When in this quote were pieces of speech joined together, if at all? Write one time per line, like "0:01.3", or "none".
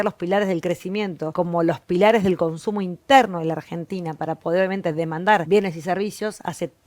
0:01.2
0:05.4